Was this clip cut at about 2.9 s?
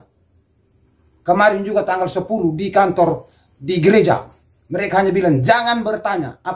no; 0 cuts

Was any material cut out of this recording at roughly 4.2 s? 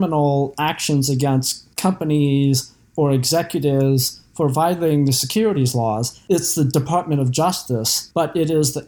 no; 3 cuts; at 1.6 s, 6.1 s, 8.0 s

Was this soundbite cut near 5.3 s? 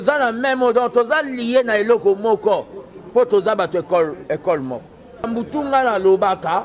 yes; 1 cut; at 5.3 s

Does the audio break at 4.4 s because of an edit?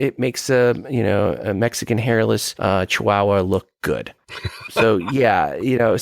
yes; 1 cut; at 4.4 s

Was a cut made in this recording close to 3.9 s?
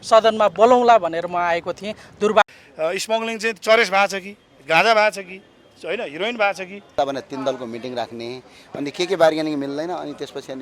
no; 2 cuts; at 2.4 s, 6.9 s

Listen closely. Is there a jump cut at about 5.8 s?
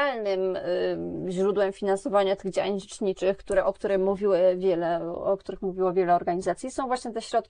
no; 0 cuts

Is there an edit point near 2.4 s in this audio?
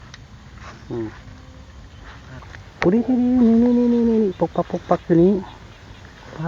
yes; 1 cut; at 2.4 s

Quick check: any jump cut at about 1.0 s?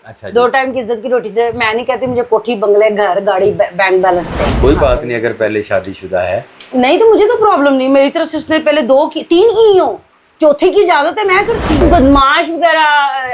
no; 2 cuts; at 4.4 s, 11.8 s

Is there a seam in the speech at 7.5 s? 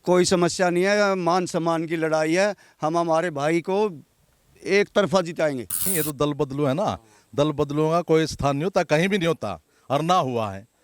no; 1 cut; at 5.8 s

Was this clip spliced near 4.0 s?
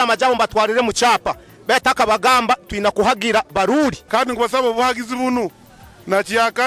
yes; 1 cut; at 4.0 s

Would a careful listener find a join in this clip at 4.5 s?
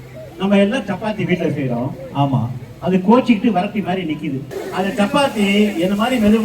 yes; 1 cut; at 4.5 s

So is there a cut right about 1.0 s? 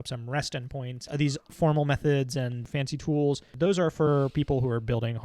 yes; 1 cut; at 1.0 s

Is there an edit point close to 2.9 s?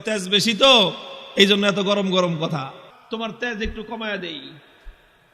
yes; 1 cut; at 2.9 s

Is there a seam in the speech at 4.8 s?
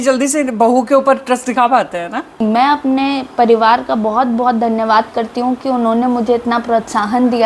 no; 1 cut; at 2.4 s

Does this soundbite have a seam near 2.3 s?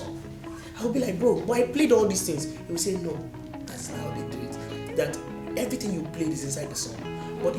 no; 0 cuts

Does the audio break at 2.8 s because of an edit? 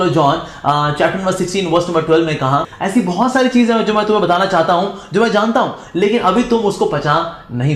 yes; 1 cut; at 2.8 s

